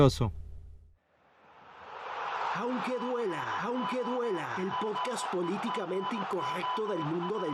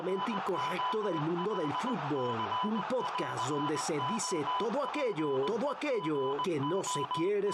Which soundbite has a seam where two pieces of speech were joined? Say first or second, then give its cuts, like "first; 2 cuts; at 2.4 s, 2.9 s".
first; 1 cut; at 0.9 s